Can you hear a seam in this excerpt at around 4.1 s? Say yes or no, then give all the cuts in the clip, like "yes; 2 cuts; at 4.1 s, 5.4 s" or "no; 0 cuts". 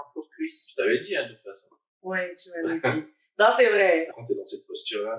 yes; 1 cut; at 4.1 s